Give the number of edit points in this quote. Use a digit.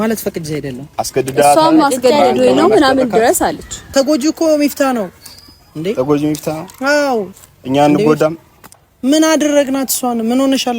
1